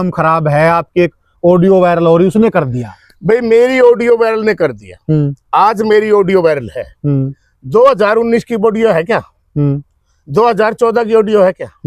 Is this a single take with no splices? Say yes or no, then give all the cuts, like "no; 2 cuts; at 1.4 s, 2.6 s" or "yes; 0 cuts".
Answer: yes; 0 cuts